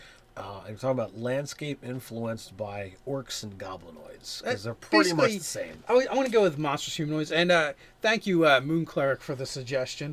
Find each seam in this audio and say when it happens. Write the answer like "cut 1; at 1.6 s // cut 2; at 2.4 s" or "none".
none